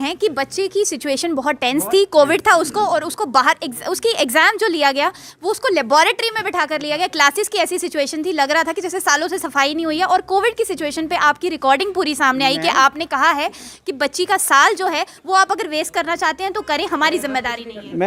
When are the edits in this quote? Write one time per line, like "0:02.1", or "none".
none